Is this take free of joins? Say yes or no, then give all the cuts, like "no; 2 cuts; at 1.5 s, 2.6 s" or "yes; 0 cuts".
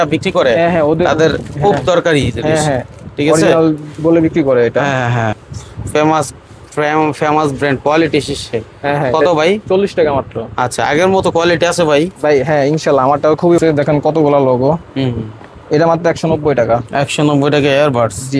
no; 2 cuts; at 5.3 s, 13.6 s